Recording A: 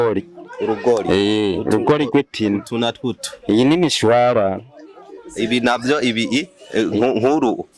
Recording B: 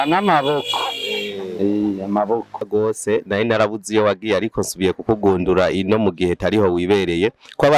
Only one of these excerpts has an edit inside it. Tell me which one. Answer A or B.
B